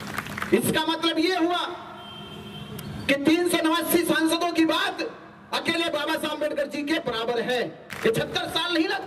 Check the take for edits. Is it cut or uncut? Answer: cut